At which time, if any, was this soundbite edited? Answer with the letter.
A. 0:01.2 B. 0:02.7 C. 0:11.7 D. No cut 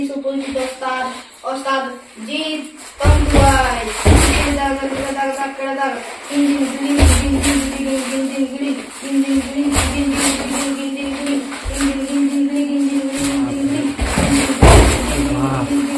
D